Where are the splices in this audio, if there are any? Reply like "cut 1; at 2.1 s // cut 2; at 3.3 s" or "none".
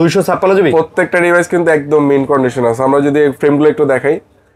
none